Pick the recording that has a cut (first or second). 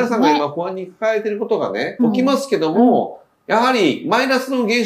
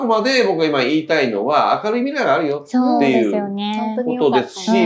first